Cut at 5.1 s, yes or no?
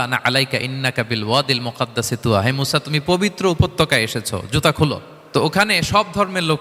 yes